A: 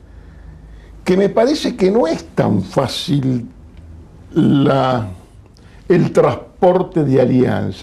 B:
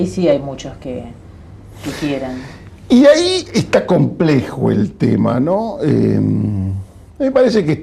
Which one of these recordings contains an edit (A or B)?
A